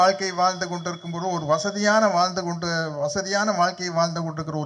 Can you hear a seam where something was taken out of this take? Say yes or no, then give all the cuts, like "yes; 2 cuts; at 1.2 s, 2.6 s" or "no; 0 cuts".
no; 0 cuts